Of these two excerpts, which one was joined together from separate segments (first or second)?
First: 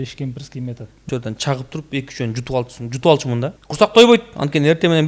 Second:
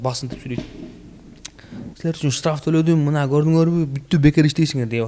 first